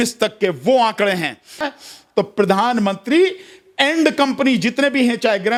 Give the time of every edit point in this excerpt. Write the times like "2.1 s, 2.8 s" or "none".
none

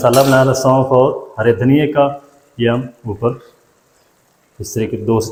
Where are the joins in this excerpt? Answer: none

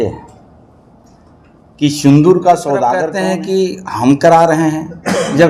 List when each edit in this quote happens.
3.1 s

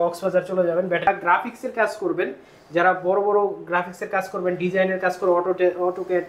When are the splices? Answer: 1.1 s

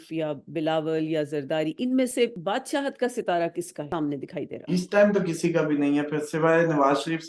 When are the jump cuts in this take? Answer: none

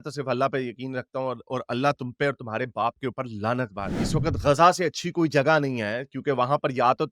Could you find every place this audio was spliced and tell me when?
4.0 s

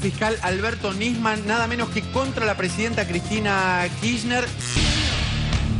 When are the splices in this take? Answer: 4.8 s

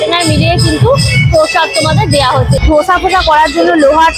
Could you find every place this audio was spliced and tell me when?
2.6 s

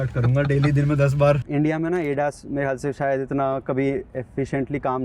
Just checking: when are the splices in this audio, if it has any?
1.4 s

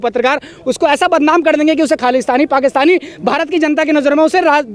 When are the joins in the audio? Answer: none

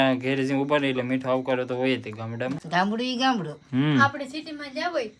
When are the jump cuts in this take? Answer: 2.6 s

